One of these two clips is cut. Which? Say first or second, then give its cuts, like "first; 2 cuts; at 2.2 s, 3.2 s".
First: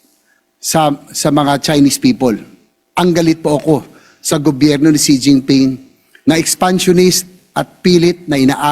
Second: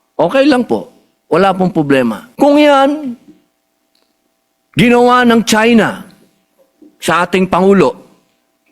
second; 1 cut; at 2.2 s